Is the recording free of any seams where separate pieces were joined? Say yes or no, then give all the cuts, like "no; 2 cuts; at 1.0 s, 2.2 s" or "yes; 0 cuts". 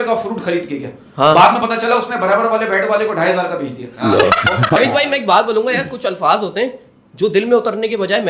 no; 1 cut; at 4.7 s